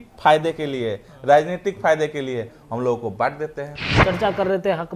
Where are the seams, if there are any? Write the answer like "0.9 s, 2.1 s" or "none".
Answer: 3.9 s